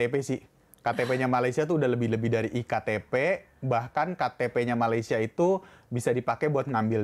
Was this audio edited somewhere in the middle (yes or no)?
no